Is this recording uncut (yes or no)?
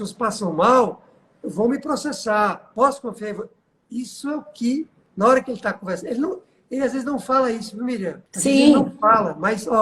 no